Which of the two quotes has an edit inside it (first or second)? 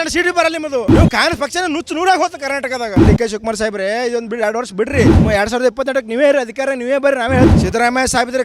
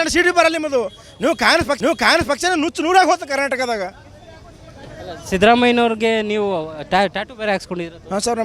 first